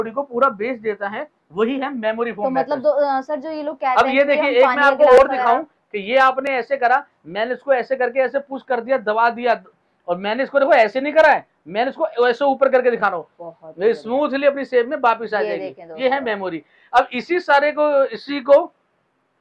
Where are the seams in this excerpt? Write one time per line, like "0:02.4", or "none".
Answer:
none